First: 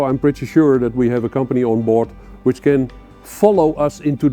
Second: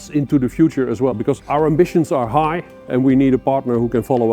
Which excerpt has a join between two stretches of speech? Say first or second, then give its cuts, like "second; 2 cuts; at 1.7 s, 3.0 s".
second; 2 cuts; at 1.4 s, 2.8 s